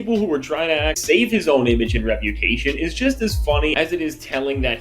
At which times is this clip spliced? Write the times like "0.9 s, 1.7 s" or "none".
1.0 s